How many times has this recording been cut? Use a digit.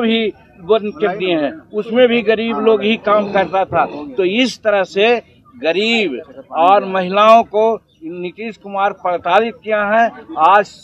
0